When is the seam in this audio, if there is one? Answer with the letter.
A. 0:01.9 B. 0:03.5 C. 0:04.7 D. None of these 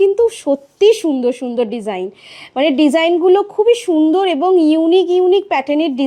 D